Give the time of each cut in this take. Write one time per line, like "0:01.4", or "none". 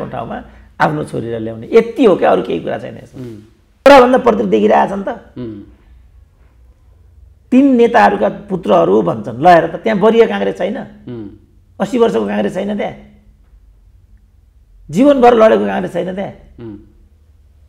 0:03.9

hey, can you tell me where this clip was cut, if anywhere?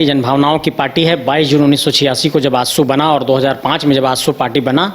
none

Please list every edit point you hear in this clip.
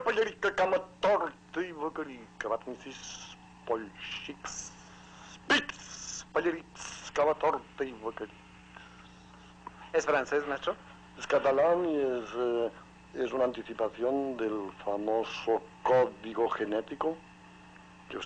none

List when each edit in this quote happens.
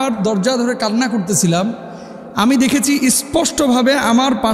none

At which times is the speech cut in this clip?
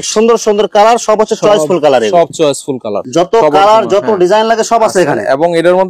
0:03.0

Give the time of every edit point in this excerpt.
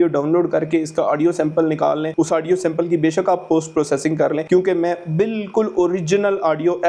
none

